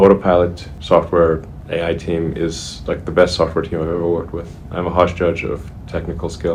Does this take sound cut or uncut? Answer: uncut